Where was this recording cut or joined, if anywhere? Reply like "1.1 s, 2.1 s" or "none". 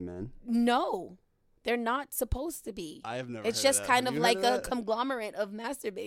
none